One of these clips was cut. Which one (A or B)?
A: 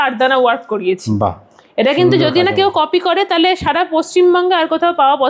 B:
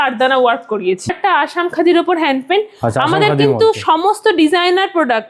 B